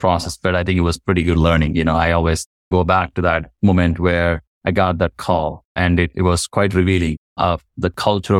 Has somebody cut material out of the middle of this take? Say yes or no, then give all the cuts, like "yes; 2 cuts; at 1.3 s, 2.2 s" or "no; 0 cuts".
yes; 3 cuts; at 4.5 s, 5.6 s, 7.2 s